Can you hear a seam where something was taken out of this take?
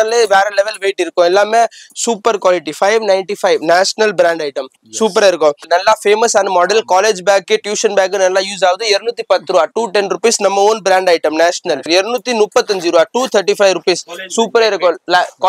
yes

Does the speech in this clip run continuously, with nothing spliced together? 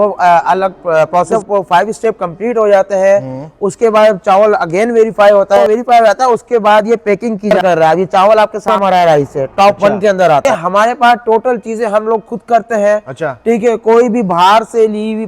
no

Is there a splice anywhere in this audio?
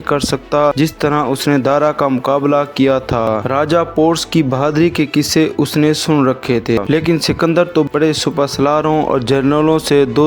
yes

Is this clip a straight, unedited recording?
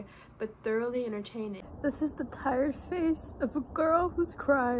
no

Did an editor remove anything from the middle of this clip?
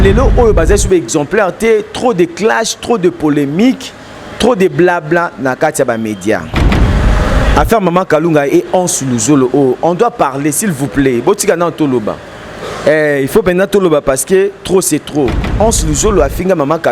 yes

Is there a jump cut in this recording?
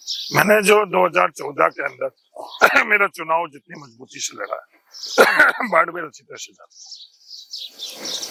no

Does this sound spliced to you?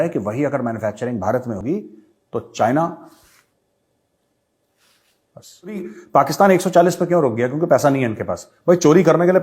yes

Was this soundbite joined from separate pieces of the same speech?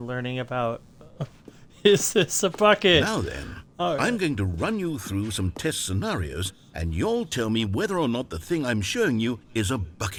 no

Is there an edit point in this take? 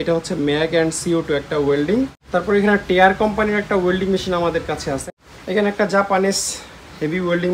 yes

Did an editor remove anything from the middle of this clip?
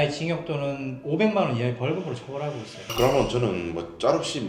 yes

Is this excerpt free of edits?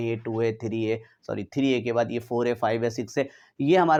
yes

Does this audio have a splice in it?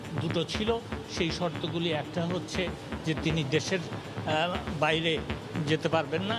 no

